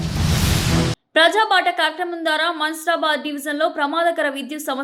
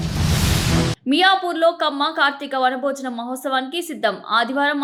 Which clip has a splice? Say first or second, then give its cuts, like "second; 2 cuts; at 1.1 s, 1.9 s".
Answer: first; 1 cut; at 1.0 s